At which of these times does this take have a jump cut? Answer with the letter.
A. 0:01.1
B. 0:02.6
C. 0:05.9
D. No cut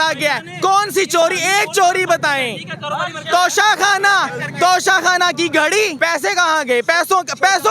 C